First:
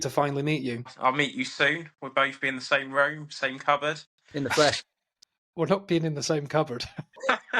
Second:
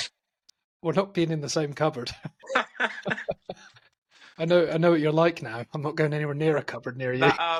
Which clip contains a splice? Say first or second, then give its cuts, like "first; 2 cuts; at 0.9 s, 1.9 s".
first; 1 cut; at 0.9 s